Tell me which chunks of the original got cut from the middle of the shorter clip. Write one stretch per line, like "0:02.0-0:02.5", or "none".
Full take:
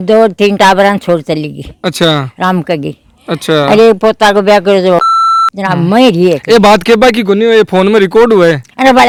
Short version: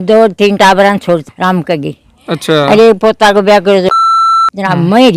0:01.2-0:02.2

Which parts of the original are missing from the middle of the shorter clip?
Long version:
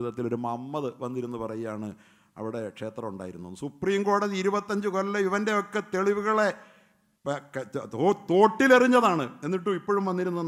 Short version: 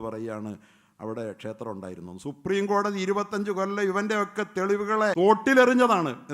0:06.5-0:08.3

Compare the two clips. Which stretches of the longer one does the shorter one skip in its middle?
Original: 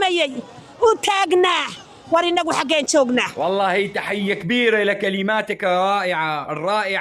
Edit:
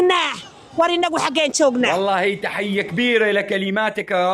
0:03.2-0:03.4

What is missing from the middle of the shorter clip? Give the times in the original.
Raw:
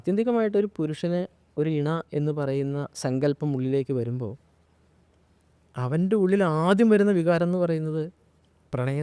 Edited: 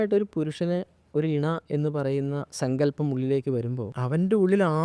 0:04.3-0:05.7

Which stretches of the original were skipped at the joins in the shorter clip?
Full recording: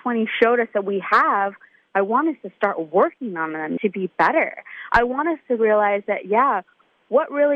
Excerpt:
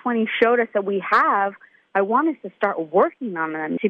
none

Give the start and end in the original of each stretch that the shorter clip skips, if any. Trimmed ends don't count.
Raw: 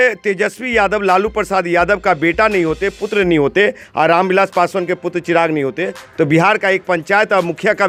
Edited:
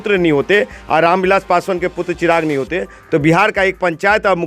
none

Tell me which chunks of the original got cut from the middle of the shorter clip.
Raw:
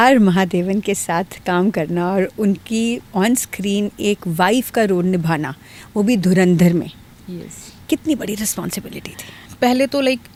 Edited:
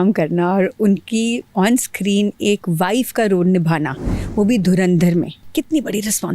0:07.0-0:07.7

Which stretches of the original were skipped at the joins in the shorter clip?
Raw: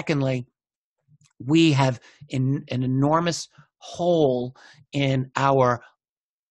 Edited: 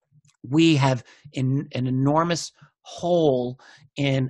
none

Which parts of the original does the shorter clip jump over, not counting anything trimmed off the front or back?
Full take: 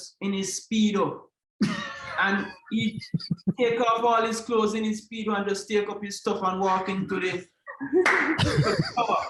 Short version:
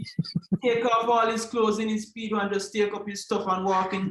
none

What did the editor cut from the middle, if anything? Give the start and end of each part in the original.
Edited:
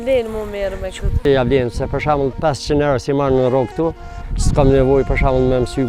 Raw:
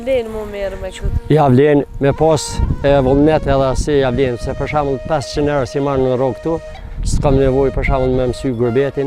0:01.2-0:03.8

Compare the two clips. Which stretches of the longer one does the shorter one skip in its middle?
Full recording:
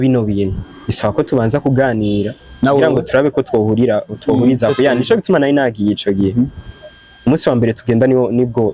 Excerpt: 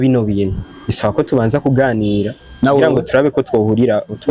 none

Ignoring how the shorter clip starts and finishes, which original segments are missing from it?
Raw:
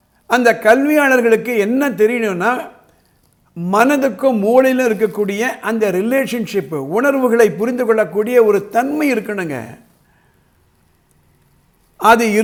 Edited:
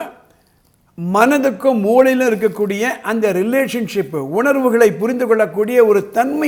none

